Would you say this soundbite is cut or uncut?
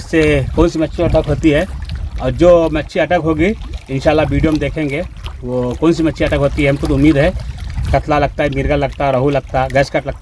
uncut